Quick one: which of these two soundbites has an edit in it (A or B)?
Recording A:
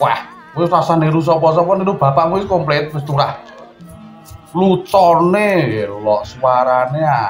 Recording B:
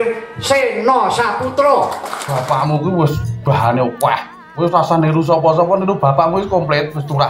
B